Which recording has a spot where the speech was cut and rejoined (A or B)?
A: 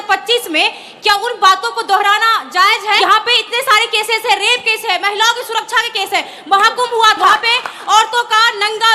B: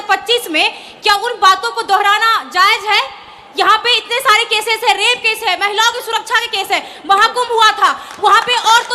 A